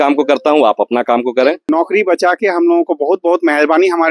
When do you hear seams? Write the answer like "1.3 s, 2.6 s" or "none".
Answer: 1.7 s